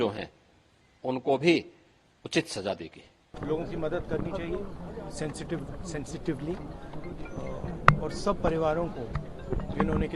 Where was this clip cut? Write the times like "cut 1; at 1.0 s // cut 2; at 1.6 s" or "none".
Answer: cut 1; at 3.3 s